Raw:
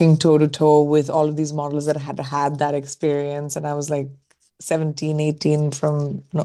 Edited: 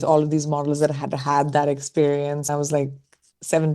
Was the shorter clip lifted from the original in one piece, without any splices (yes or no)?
no